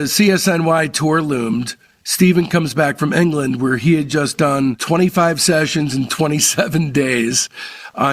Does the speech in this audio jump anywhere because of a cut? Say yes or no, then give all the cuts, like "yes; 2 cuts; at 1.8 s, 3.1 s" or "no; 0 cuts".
no; 0 cuts